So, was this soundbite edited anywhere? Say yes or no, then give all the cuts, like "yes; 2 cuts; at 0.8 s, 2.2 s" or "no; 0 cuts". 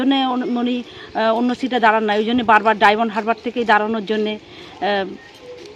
no; 0 cuts